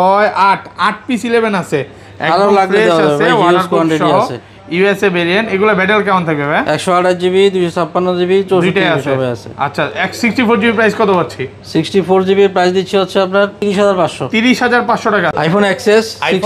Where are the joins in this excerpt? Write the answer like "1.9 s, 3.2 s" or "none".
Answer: 13.6 s, 15.3 s